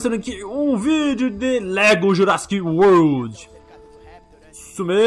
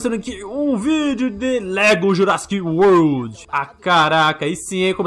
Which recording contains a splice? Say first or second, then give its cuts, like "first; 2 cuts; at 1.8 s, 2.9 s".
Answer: second; 1 cut; at 3.4 s